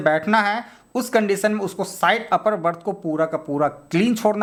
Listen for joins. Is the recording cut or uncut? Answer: uncut